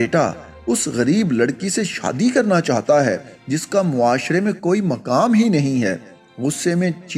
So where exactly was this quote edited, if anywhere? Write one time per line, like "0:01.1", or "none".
none

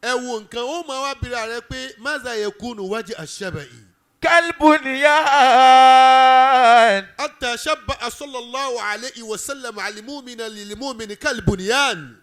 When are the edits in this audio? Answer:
none

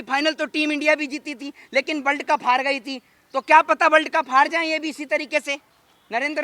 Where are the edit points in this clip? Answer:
none

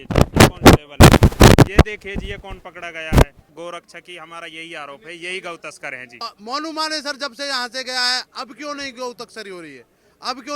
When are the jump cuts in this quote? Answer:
0:03.5
0:06.2

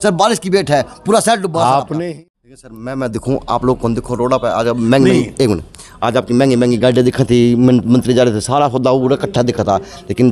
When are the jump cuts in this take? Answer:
0:02.0

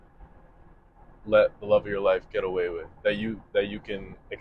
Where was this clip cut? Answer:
none

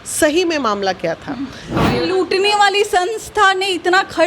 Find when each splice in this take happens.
0:01.8

